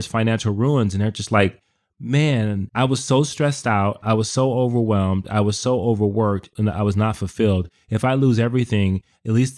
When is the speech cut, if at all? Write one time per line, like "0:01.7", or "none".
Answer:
0:02.7